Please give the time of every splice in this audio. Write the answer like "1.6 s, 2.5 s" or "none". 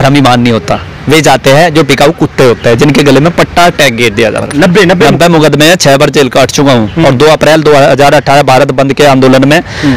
4.4 s